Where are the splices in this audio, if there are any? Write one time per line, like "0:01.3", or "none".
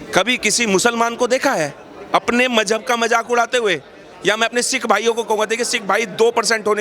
none